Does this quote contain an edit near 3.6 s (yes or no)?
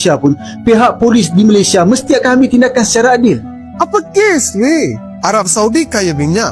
yes